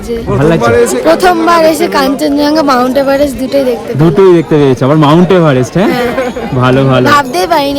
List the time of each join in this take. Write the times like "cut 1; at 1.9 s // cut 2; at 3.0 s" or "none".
none